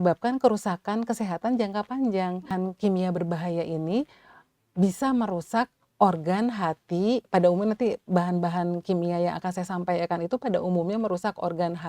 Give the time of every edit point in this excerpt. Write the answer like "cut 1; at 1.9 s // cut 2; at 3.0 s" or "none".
cut 1; at 2.5 s

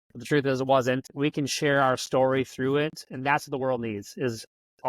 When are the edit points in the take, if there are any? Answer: cut 1; at 1.0 s

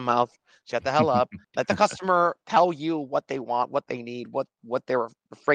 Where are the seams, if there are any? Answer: cut 1; at 1.4 s

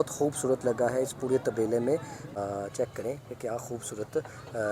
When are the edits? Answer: cut 1; at 2.3 s

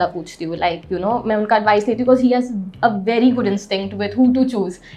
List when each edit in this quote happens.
none

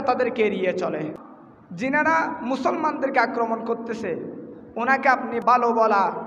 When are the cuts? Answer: cut 1; at 1.2 s // cut 2; at 5.4 s

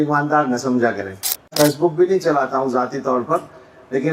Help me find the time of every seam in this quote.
cut 1; at 1.5 s

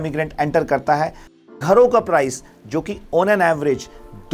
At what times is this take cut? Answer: cut 1; at 1.5 s

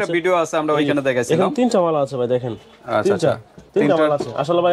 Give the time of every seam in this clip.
none

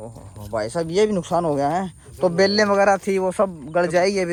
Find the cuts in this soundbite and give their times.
none

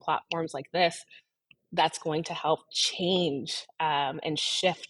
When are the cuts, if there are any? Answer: none

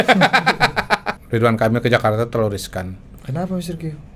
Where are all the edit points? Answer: cut 1; at 1.1 s

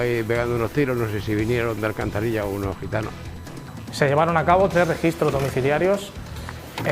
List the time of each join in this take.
cut 1; at 3.6 s

